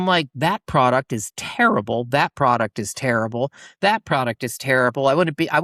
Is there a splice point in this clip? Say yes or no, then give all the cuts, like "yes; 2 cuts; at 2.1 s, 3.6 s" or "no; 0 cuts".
no; 0 cuts